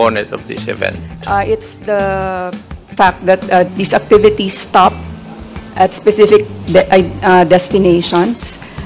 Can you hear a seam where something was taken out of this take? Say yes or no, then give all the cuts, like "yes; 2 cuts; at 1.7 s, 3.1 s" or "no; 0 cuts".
yes; 2 cuts; at 2.8 s, 3.7 s